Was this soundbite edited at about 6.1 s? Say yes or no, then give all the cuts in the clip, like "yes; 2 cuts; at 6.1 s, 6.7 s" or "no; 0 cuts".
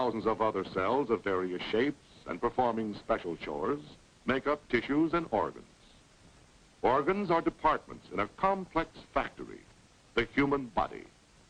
no; 1 cut; at 1.5 s